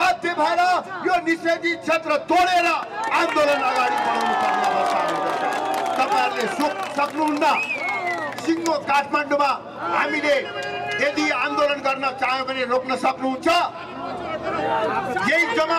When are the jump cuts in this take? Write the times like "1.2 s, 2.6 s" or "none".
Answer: none